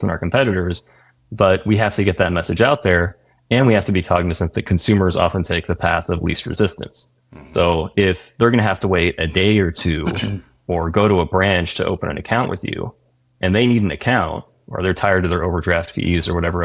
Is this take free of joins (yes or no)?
yes